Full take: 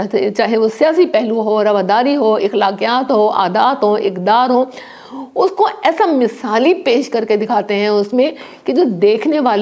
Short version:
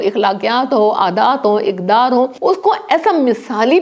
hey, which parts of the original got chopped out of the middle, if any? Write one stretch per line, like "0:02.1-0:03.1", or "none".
0:04.7-0:05.3